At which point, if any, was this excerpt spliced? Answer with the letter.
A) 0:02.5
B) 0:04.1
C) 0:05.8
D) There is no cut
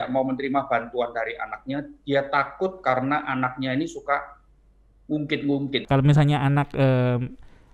C